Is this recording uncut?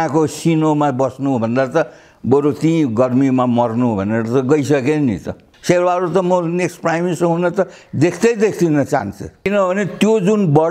no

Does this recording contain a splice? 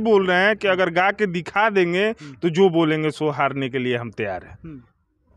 no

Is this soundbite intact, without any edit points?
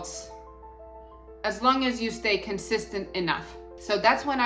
no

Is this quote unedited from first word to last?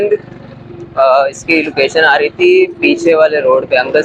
yes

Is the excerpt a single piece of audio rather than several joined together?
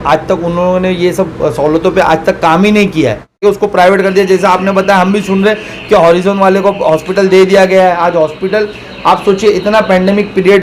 no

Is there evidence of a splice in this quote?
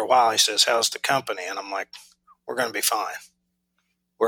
no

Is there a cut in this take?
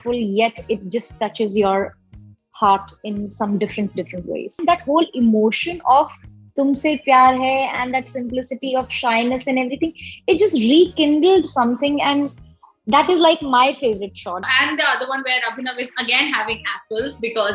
yes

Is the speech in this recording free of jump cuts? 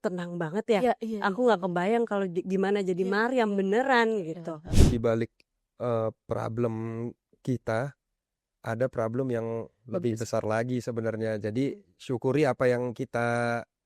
no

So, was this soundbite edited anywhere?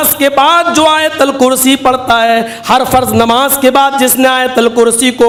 no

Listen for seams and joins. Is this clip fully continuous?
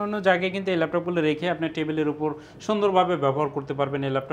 yes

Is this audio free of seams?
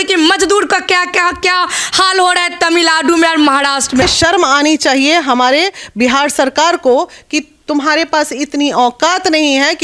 no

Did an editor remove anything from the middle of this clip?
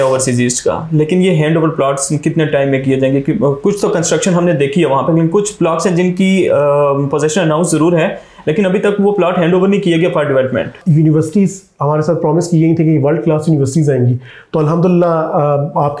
yes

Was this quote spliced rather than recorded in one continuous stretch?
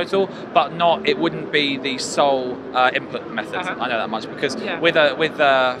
no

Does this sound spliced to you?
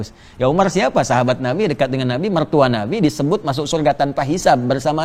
no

